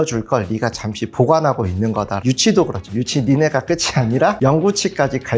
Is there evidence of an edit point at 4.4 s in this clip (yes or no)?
no